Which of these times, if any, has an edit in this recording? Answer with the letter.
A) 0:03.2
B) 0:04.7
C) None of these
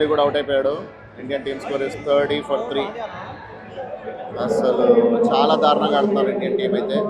C